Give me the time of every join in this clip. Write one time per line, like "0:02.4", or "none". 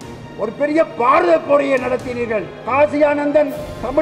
0:02.6